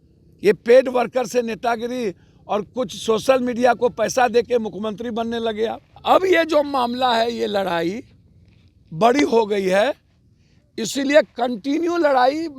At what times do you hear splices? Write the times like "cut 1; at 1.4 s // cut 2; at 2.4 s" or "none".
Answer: cut 1; at 5.9 s